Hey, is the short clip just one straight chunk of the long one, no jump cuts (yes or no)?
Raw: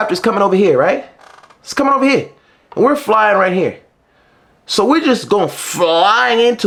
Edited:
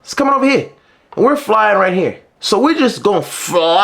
no